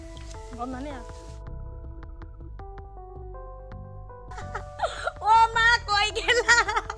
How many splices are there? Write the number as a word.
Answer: one